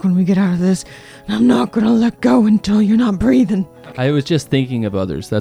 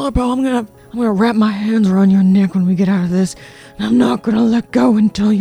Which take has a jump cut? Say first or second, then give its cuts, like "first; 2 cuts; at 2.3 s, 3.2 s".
first; 1 cut; at 3.8 s